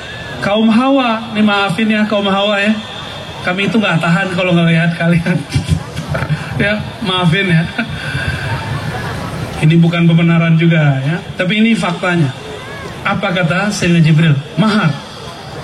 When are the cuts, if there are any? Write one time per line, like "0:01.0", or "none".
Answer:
none